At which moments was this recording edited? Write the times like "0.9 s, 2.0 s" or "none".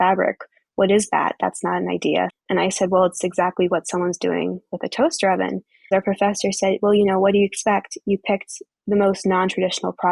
2.3 s, 5.9 s